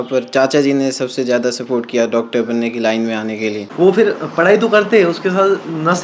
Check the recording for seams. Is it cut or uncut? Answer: cut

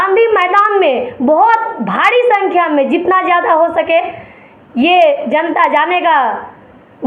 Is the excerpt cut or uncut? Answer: uncut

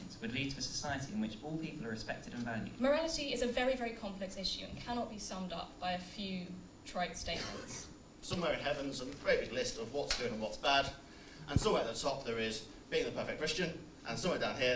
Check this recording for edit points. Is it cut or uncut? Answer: cut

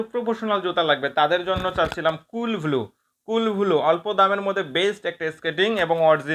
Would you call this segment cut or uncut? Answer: uncut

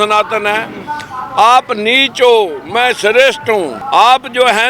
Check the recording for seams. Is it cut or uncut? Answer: cut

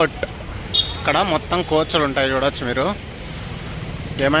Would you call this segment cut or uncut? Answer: uncut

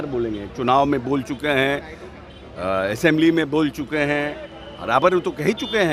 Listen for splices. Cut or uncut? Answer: uncut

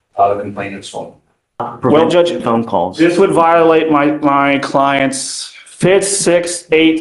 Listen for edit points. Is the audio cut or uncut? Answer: cut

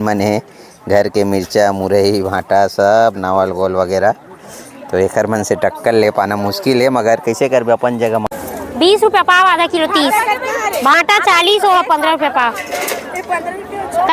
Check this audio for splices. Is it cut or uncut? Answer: cut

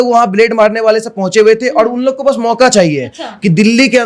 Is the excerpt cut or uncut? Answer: uncut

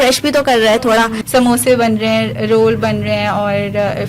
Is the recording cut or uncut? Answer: cut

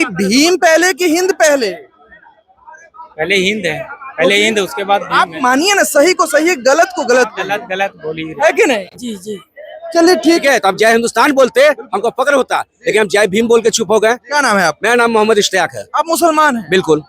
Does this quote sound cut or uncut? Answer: cut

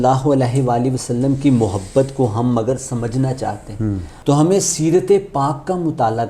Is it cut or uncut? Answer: cut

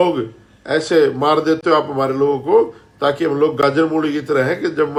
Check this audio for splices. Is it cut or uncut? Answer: uncut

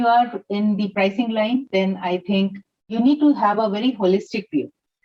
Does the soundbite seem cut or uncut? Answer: cut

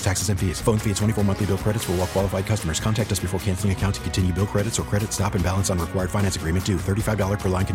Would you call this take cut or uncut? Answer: uncut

